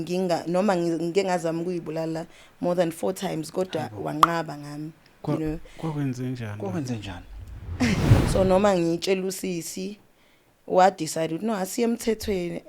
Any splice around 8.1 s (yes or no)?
yes